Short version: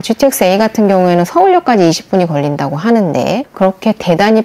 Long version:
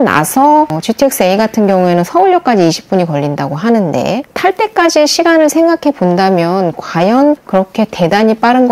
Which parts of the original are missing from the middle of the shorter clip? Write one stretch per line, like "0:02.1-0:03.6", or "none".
0:04.3-0:07.4